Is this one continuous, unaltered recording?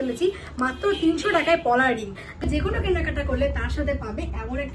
no; 1 cut; at 2.4 s

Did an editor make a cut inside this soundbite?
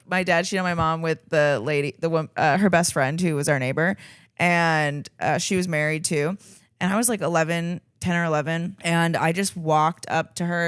yes; 1 cut; at 8.7 s

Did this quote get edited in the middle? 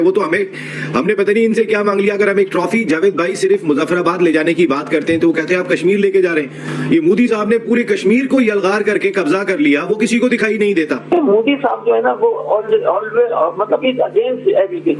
yes; 1 cut; at 11.1 s

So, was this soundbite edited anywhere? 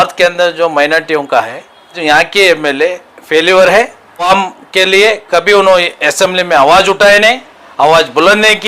yes; 2 cuts; at 2.0 s, 4.3 s

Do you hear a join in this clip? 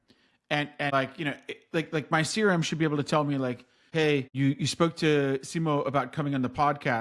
yes; 2 cuts; at 0.9 s, 3.9 s

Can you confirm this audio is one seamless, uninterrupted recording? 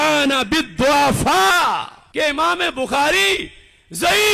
no; 1 cut; at 2.0 s

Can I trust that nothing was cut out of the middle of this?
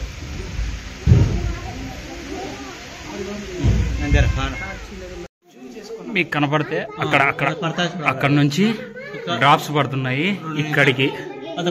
no; 1 cut; at 5.5 s

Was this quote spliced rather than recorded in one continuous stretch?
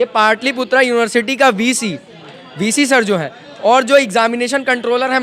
no; 0 cuts

